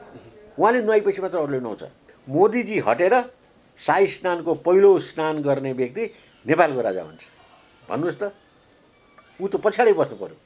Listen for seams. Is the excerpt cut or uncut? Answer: cut